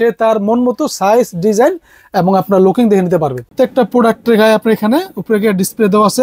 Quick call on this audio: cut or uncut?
cut